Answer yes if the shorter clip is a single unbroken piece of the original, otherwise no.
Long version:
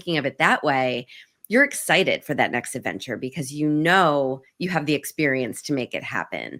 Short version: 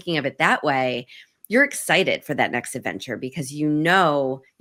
yes